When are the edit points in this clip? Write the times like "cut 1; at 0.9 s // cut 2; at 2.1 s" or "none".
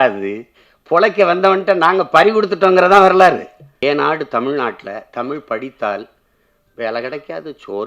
cut 1; at 3.7 s